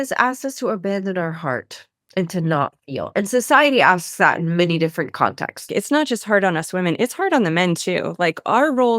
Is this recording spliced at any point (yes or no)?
yes